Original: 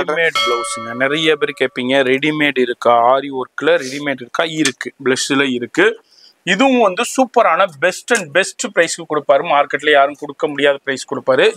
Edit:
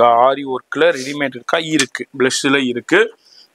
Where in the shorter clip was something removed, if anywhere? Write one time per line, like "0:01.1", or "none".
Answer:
none